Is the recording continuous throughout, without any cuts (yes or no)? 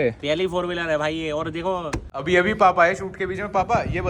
no